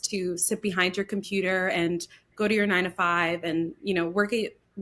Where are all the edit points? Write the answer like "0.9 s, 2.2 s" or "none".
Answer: none